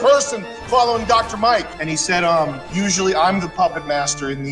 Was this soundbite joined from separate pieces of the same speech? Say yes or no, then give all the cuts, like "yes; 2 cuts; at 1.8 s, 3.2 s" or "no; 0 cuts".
yes; 2 cuts; at 1.6 s, 2.6 s